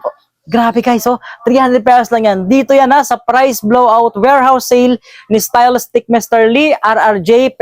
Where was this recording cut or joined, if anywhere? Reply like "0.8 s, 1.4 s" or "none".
none